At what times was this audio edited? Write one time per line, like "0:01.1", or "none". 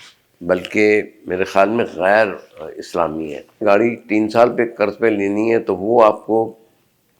0:03.6